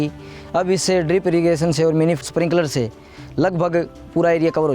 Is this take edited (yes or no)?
yes